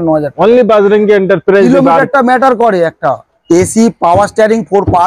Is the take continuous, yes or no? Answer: no